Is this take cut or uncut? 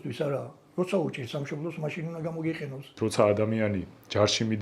cut